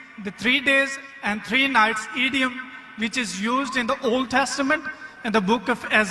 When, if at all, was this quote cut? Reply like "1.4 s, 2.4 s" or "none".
none